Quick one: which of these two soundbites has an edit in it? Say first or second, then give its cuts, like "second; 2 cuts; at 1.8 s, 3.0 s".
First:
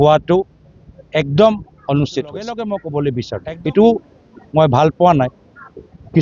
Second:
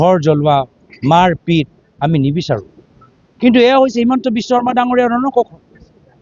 first; 1 cut; at 2.7 s